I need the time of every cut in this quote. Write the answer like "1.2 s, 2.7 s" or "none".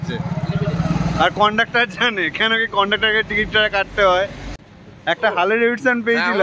4.6 s